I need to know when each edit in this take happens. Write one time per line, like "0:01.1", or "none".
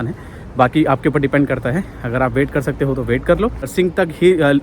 0:03.7